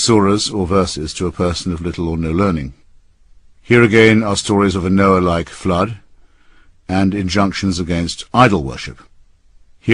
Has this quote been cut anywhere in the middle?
yes; 1 cut; at 5.5 s

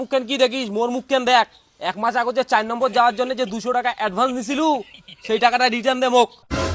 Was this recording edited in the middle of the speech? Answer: no; 0 cuts

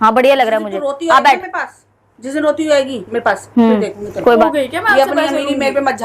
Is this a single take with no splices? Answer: no; 1 cut; at 4.4 s

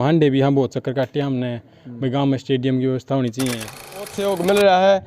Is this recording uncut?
no; 1 cut; at 4.1 s

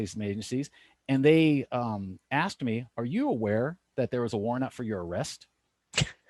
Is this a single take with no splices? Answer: yes; 0 cuts

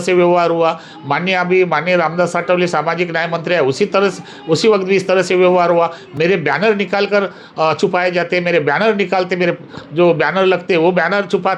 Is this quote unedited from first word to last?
yes; 0 cuts

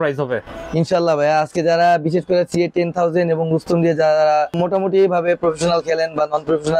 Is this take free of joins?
no; 1 cut; at 4.5 s

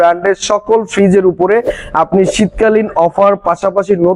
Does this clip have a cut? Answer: no; 0 cuts

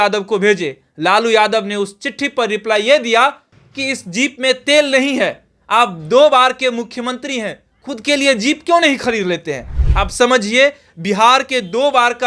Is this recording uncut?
yes; 0 cuts

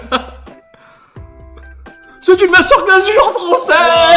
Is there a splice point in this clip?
no; 0 cuts

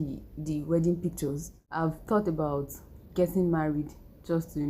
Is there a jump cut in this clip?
yes; 1 cut; at 1.6 s

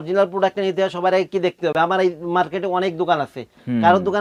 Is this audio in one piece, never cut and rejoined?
yes; 0 cuts

